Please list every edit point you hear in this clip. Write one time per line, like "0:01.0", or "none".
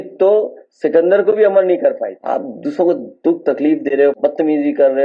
0:02.2
0:04.2